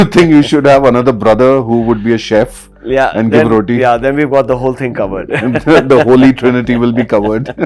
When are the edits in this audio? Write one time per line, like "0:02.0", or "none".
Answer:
none

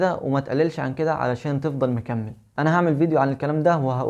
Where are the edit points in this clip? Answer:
0:02.4

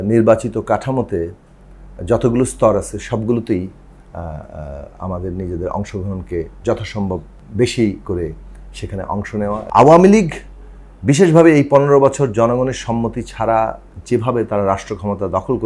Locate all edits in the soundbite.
0:07.4
0:09.6

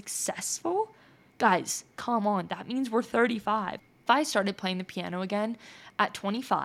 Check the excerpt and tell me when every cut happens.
0:03.7

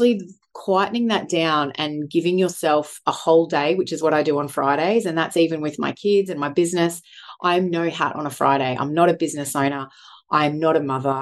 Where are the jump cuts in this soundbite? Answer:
none

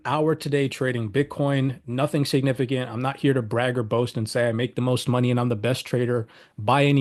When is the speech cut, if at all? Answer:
none

